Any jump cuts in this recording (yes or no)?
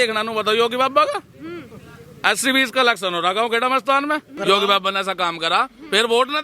yes